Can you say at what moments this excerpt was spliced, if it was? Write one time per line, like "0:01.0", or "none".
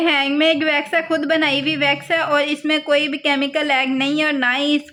none